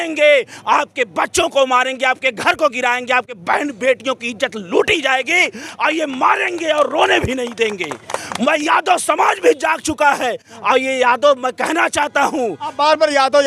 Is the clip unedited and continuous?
yes; 0 cuts

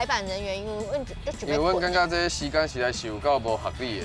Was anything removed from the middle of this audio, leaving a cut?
no; 0 cuts

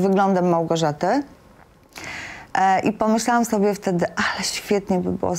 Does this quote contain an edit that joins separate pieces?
no; 0 cuts

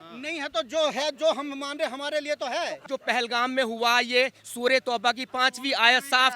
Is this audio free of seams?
no; 1 cut; at 2.8 s

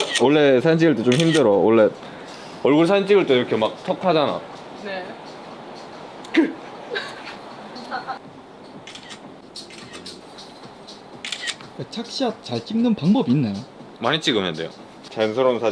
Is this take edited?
no; 0 cuts

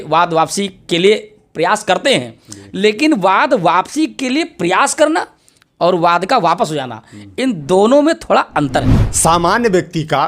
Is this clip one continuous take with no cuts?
no; 1 cut; at 9.0 s

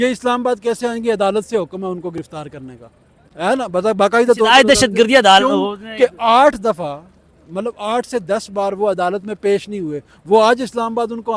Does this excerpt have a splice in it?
no; 0 cuts

